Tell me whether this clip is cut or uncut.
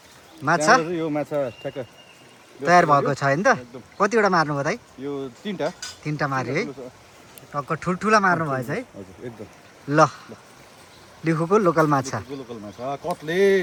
uncut